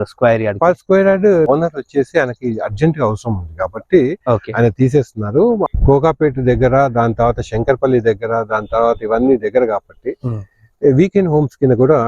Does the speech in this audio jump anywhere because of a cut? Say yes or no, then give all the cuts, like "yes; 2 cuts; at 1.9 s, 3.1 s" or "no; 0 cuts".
yes; 2 cuts; at 1.5 s, 5.7 s